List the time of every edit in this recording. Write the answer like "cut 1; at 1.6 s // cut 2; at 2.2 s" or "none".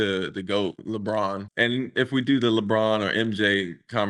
cut 1; at 1.1 s